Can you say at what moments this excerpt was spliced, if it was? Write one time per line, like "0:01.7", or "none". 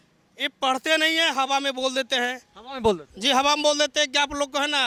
none